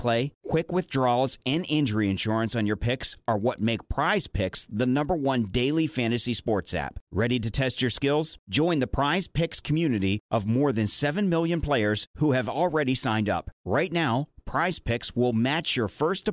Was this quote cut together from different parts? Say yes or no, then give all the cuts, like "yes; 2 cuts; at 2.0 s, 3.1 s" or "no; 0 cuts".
no; 0 cuts